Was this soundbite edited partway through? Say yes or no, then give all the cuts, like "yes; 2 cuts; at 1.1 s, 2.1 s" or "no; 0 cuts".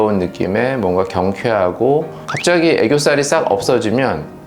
yes; 1 cut; at 2.2 s